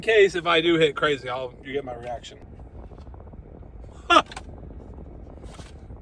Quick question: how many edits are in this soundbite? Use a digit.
1